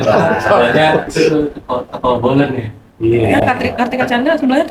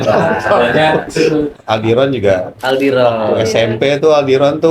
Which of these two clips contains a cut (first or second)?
second